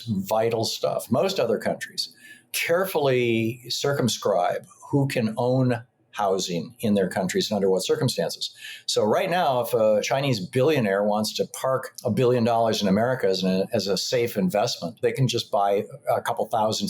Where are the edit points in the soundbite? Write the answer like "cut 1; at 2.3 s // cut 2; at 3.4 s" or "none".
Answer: cut 1; at 1.1 s // cut 2; at 10.0 s // cut 3; at 11.9 s